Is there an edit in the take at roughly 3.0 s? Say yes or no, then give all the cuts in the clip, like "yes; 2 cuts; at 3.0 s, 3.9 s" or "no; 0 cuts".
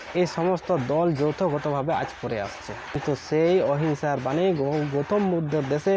yes; 1 cut; at 3.0 s